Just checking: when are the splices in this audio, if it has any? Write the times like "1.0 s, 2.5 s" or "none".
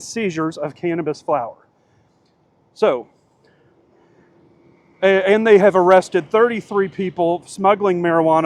none